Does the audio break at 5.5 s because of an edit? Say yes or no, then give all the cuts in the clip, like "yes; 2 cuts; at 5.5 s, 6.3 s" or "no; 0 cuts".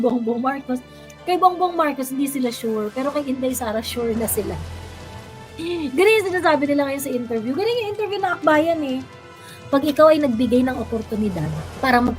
no; 1 cut; at 9.4 s